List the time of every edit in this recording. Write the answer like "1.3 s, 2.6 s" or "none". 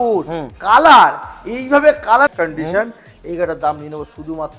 2.3 s